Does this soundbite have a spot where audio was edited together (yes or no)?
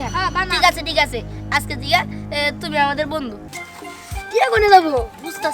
yes